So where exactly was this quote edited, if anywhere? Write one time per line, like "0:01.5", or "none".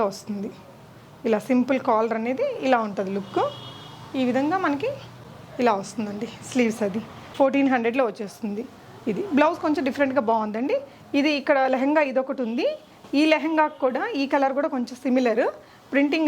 none